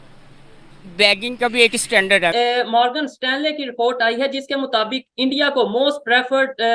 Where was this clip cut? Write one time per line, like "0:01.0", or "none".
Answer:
0:02.3